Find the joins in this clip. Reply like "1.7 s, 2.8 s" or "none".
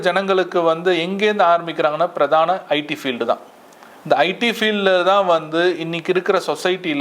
none